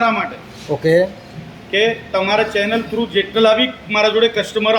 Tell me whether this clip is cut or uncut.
uncut